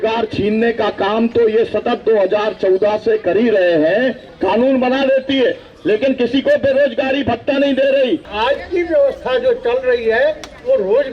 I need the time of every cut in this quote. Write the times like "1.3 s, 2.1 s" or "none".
4.3 s, 8.3 s